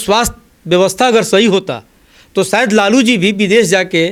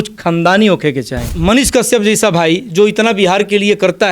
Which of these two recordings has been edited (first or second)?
second